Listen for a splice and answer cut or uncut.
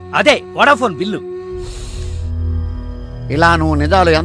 uncut